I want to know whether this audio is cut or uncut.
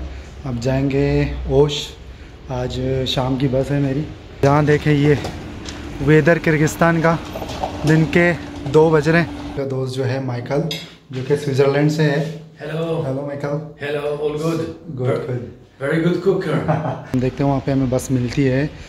cut